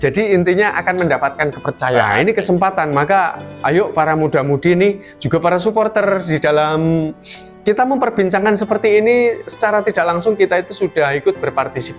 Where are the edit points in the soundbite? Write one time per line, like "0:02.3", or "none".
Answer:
0:02.1